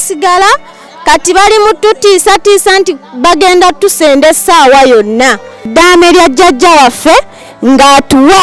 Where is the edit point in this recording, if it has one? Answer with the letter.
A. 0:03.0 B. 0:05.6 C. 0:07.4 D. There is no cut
D